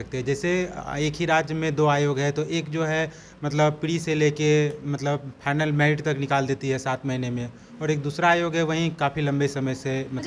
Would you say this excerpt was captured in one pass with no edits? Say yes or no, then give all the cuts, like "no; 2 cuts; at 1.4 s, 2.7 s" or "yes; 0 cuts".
yes; 0 cuts